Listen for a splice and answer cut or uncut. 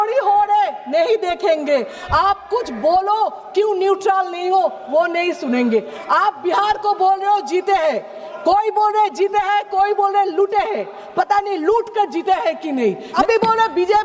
cut